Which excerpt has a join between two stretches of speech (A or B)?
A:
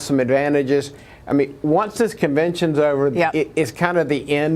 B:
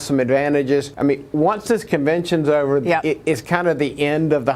B